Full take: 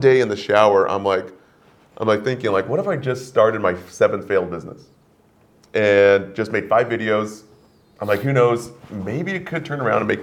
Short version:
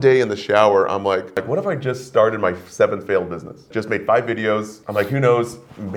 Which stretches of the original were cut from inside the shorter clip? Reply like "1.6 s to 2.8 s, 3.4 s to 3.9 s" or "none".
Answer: 1.4 s to 2.6 s, 4.9 s to 6.3 s, 7.4 s to 7.9 s